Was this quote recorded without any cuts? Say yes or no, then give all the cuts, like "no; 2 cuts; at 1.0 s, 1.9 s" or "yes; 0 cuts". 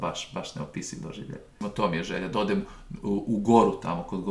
no; 1 cut; at 1.6 s